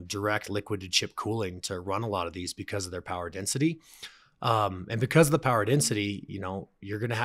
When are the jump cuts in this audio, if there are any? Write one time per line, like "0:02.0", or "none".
none